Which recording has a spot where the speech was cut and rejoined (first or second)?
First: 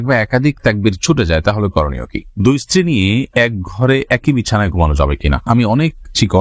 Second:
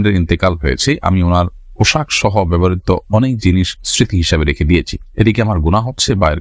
first